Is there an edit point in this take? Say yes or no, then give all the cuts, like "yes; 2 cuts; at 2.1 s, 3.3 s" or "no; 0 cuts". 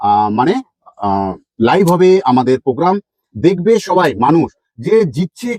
no; 0 cuts